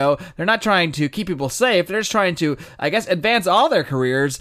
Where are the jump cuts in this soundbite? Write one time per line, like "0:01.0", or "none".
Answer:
none